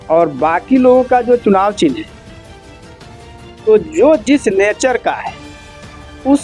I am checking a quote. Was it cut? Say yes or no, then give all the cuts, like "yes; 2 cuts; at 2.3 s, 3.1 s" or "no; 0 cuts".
yes; 2 cuts; at 2.1 s, 3.6 s